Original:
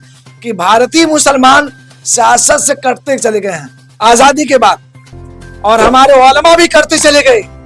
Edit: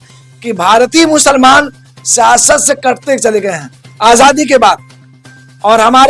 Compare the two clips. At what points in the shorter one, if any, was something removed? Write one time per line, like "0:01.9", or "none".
none

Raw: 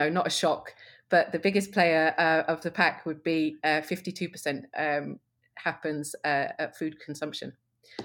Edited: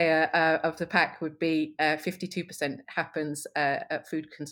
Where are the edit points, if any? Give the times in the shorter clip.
0:02.8

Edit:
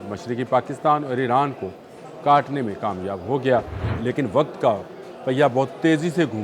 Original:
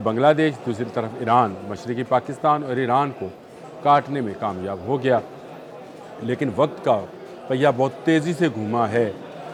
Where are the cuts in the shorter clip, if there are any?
0:03.8

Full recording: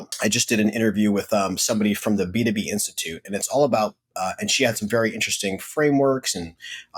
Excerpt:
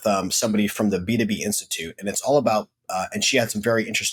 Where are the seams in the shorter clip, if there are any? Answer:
none

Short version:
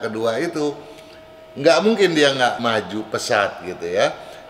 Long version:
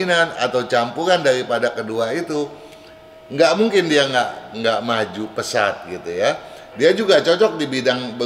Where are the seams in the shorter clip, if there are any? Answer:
0:02.6

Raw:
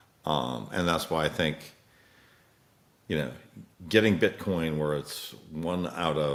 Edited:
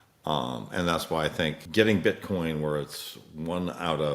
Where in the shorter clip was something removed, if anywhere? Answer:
0:01.6

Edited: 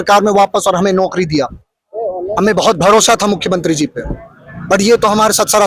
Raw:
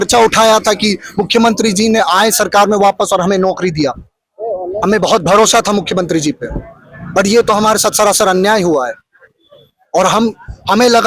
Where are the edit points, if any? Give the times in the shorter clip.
none

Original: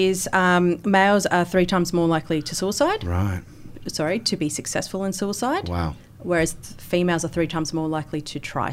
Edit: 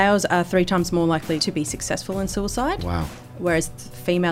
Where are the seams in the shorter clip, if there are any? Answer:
0:01.4

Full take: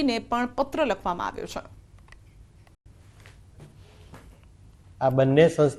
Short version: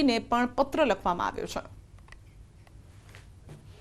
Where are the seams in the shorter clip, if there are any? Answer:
0:02.8

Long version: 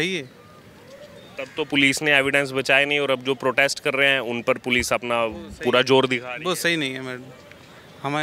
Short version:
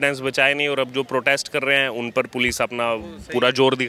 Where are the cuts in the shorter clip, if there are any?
none

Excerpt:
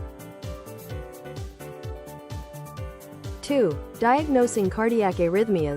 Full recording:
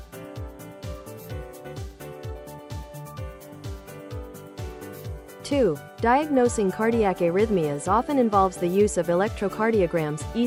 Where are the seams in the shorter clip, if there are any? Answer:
0:03.4

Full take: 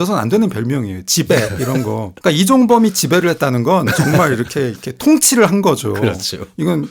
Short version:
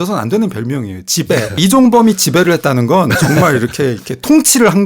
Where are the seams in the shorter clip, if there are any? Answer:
0:01.6

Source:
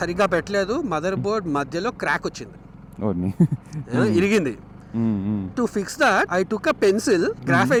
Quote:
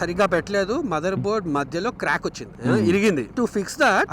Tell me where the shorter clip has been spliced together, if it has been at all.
0:02.5
0:03.3

